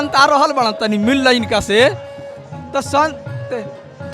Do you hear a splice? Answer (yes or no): no